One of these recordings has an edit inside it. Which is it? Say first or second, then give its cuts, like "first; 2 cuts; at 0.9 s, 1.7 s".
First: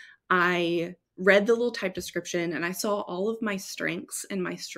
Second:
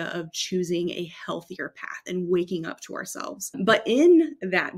second; 1 cut; at 3.6 s